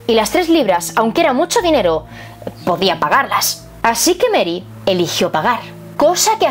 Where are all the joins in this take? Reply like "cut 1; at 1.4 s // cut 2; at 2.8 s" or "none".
none